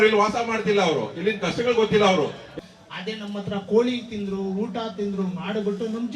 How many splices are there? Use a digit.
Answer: 1